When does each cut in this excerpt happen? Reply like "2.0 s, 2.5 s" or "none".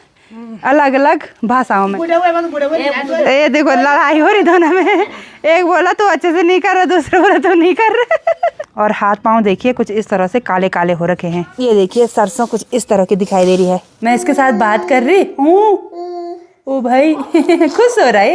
2.0 s, 8.6 s, 11.5 s, 13.9 s